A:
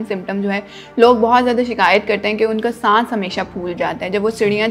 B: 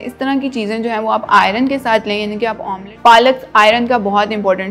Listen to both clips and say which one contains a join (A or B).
B